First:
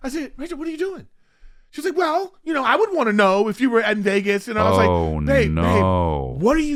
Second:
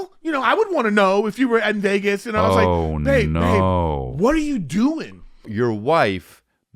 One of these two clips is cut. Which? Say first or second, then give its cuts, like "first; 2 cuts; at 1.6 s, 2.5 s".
second; 1 cut; at 5.5 s